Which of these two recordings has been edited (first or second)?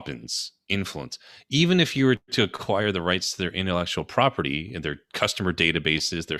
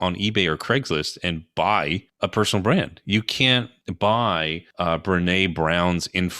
second